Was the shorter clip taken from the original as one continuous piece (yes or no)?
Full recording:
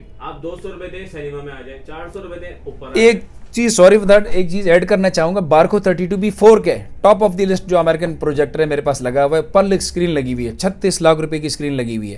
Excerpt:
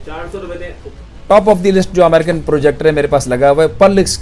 no